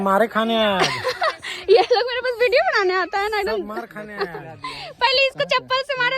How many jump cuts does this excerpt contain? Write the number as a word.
zero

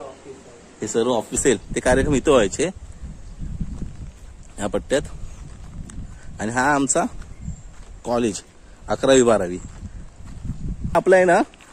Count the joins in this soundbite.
two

